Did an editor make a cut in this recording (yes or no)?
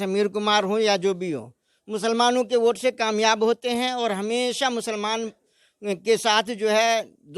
no